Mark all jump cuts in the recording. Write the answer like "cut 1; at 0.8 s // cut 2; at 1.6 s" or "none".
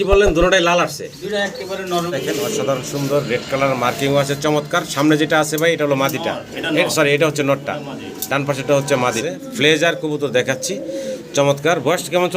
cut 1; at 2.2 s // cut 2; at 9.2 s